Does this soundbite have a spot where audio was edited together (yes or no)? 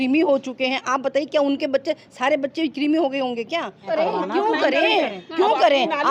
yes